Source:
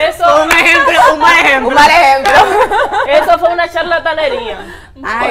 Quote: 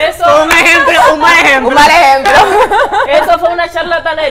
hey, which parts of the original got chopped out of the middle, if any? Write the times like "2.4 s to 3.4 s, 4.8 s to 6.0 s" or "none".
none